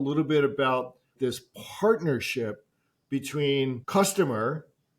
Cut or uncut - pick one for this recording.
cut